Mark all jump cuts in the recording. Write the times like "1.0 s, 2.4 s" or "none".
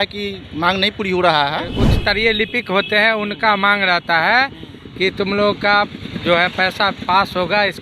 1.9 s